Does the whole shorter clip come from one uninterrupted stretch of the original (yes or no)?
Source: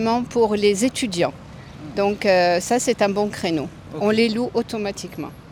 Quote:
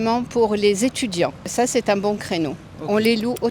no